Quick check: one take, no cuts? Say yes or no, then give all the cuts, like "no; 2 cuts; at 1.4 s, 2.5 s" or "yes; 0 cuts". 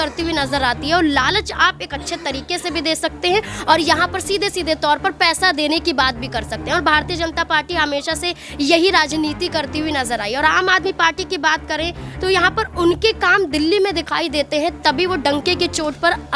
yes; 0 cuts